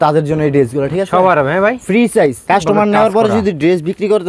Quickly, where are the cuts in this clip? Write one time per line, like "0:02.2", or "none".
0:02.4